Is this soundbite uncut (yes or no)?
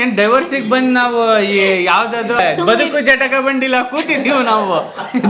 yes